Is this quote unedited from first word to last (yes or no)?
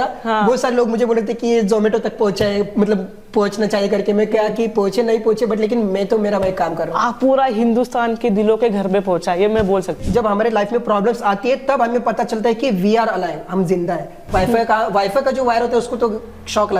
no